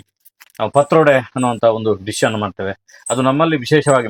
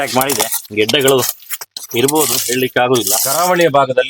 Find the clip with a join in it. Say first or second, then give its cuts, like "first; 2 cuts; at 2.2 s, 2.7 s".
second; 1 cut; at 3.2 s